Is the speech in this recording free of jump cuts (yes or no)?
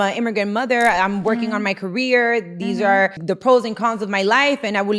no